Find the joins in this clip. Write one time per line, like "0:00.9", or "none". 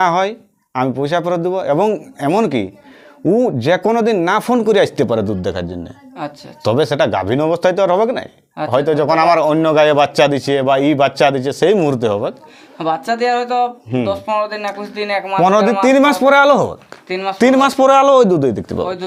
none